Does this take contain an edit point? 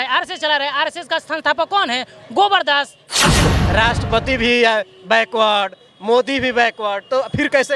yes; 1 cut; at 3.4 s

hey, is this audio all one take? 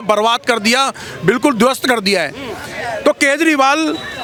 yes; 0 cuts

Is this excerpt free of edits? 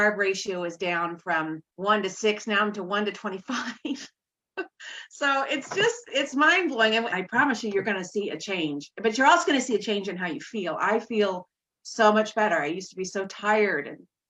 no; 2 cuts; at 1.7 s, 7.1 s

